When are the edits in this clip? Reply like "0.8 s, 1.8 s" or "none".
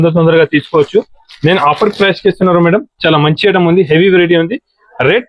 none